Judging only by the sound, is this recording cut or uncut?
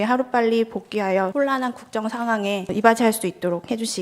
cut